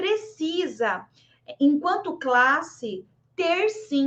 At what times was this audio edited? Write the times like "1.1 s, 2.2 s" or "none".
none